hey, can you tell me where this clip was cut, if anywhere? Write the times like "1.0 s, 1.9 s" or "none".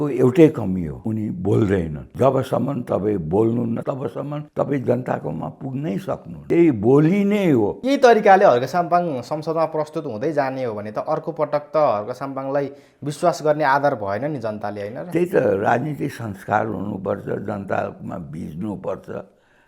1.0 s, 2.0 s, 3.9 s, 6.3 s, 7.8 s